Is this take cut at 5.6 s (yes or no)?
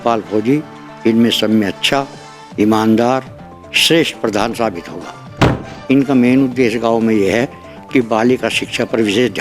yes